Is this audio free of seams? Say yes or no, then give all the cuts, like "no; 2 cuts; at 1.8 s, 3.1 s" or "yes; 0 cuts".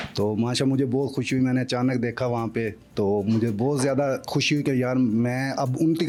yes; 0 cuts